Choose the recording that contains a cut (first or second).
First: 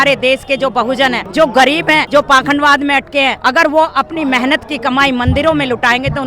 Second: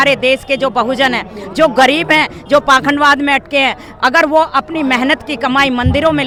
first